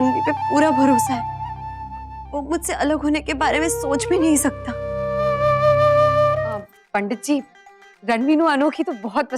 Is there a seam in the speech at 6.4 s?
yes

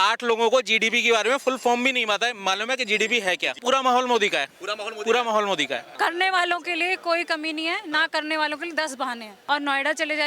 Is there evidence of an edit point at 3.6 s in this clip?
yes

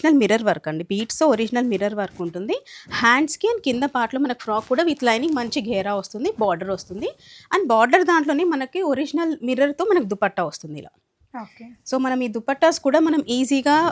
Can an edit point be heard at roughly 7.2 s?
no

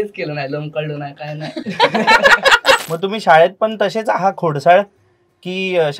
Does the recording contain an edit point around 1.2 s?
no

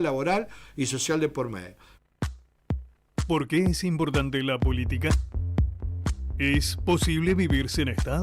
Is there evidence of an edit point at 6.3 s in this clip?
no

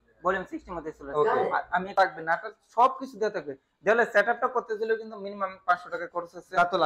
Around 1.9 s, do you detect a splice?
yes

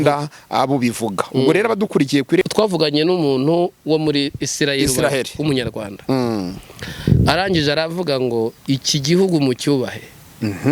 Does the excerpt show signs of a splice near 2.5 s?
yes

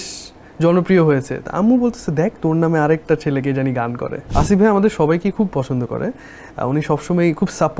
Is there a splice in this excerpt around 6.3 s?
no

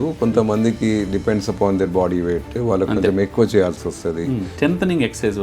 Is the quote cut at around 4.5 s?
yes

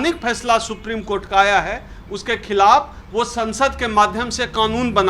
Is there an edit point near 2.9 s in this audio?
no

